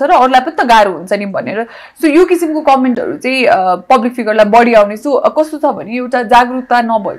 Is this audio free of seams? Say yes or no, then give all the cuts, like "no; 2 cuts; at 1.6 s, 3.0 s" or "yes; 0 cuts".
yes; 0 cuts